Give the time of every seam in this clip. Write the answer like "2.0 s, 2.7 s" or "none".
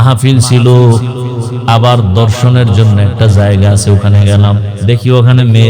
4.7 s